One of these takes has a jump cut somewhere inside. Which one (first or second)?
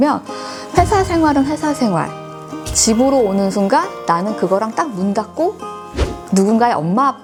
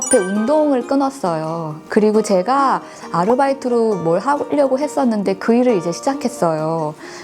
second